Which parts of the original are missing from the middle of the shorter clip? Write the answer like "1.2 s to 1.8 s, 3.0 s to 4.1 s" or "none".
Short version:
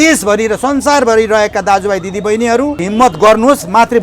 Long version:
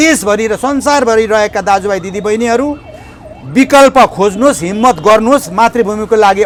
2.8 s to 4.7 s